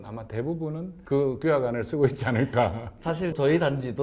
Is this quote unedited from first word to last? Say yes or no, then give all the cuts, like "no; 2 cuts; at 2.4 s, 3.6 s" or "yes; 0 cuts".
yes; 0 cuts